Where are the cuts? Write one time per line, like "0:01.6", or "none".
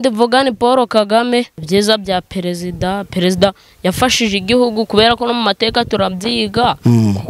0:01.6